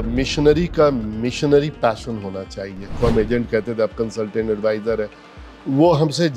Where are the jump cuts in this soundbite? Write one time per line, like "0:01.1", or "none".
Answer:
0:02.8